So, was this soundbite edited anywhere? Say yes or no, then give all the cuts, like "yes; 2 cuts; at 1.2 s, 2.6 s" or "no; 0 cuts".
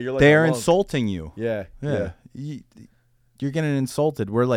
no; 0 cuts